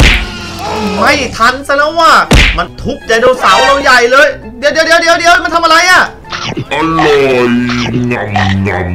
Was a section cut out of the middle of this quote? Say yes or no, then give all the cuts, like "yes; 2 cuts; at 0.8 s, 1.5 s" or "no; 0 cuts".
no; 0 cuts